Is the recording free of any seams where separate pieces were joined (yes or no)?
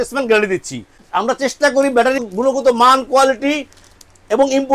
no